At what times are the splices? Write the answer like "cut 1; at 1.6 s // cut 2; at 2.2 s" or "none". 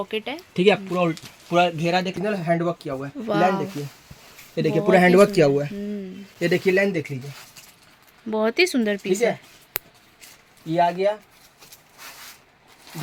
none